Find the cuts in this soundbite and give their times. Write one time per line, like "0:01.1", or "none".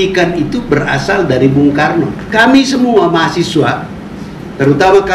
0:02.2